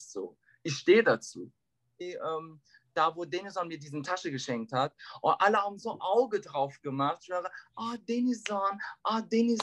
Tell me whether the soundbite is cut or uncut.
cut